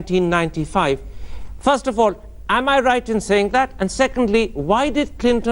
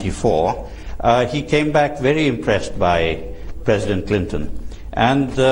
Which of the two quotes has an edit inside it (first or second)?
first